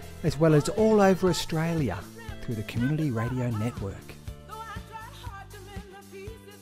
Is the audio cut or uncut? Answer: cut